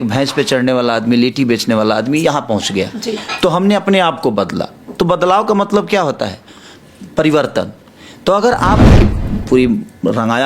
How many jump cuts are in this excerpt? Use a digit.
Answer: 1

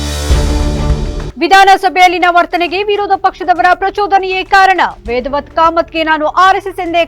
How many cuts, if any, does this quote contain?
1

